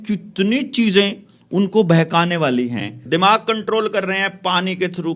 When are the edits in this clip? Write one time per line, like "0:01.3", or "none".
0:03.0